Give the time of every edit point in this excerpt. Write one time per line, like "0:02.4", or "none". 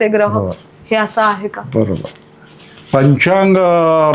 none